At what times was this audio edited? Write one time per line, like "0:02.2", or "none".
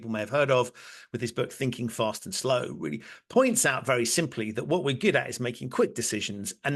none